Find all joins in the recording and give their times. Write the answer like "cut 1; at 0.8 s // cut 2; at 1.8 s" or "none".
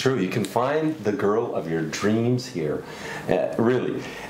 none